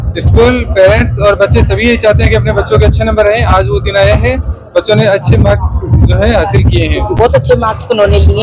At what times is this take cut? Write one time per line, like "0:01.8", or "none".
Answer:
0:07.3